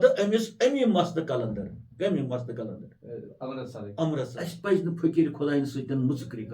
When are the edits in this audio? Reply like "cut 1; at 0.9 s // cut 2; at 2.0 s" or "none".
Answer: cut 1; at 4.3 s